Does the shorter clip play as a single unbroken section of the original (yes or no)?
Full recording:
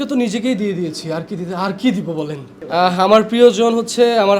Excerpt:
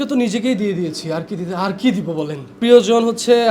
no